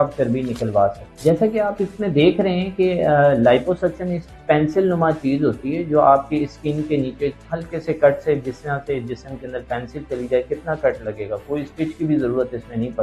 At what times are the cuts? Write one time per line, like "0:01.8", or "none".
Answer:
0:01.1